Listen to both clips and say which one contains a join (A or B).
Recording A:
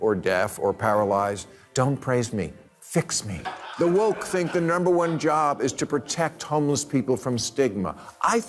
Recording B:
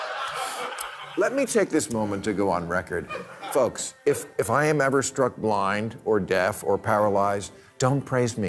A